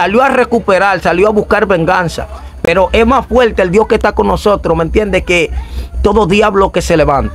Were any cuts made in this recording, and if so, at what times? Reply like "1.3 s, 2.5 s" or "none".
none